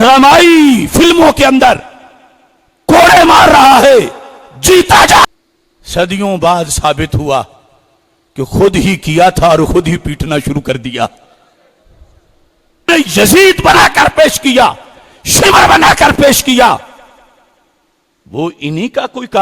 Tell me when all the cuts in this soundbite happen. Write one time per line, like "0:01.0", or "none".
0:05.2
0:12.9

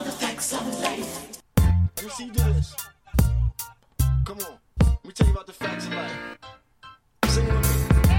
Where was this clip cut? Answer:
0:01.6

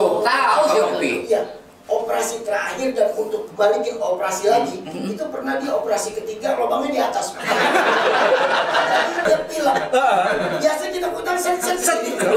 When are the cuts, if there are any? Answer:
0:09.2

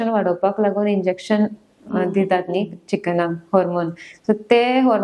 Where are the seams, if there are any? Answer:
none

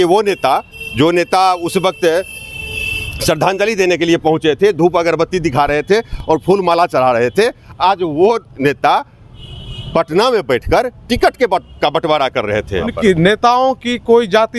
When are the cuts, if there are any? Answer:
0:12.9

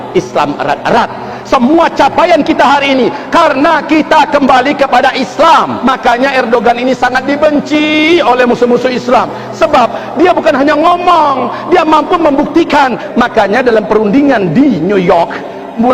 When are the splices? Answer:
0:05.7
0:13.0

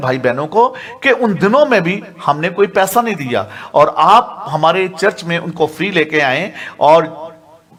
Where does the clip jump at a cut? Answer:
none

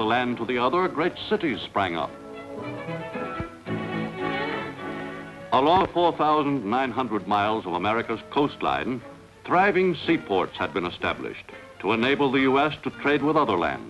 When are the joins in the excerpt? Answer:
0:12.4

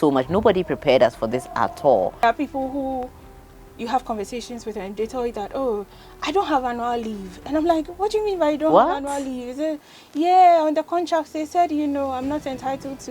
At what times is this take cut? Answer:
0:02.6

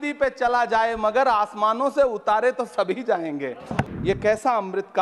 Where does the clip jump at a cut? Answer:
0:03.9

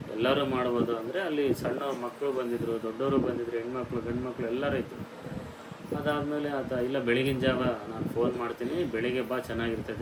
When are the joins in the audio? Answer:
none

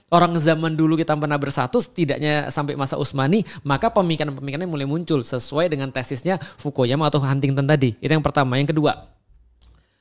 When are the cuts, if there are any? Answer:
none

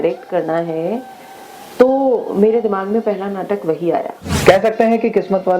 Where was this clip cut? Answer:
0:04.2

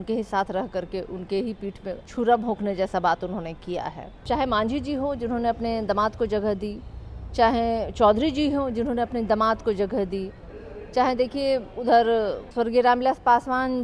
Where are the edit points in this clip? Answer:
0:02.0
0:04.2
0:12.4

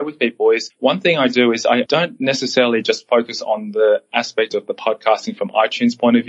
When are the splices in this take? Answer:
0:01.9

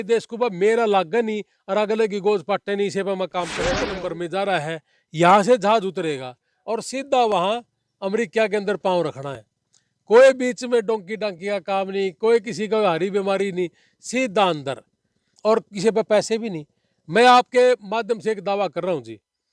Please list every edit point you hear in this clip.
0:03.8

